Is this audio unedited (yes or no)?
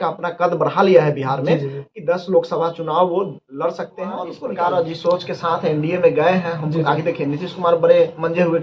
no